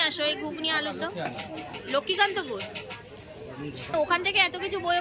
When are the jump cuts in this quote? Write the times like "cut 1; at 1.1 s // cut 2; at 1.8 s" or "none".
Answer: cut 1; at 3.9 s